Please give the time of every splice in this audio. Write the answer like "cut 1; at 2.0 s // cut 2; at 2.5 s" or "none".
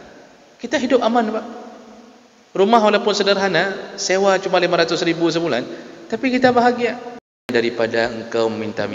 cut 1; at 7.5 s